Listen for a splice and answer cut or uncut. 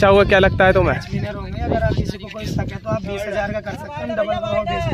uncut